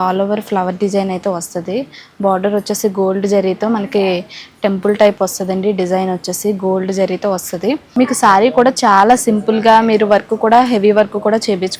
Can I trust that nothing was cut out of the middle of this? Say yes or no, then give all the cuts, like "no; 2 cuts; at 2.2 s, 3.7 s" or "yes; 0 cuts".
no; 1 cut; at 7.8 s